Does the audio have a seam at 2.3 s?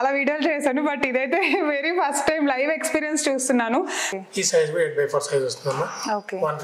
no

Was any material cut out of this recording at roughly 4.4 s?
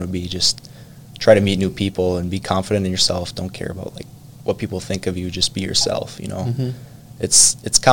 no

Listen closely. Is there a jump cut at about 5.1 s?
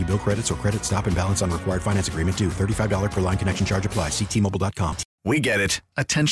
yes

